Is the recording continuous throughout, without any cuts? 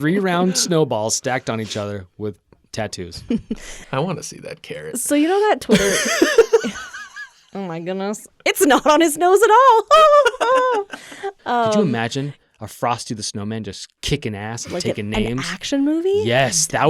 no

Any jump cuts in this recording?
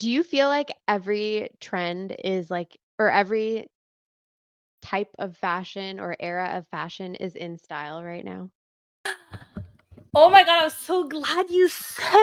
no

